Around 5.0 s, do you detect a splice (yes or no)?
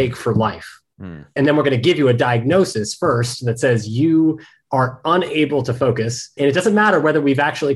no